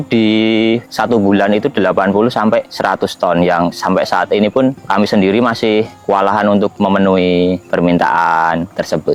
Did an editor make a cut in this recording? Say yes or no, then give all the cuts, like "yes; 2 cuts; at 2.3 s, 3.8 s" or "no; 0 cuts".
no; 0 cuts